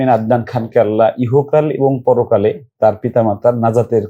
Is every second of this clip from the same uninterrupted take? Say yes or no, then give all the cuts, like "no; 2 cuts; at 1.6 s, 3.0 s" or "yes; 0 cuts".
yes; 0 cuts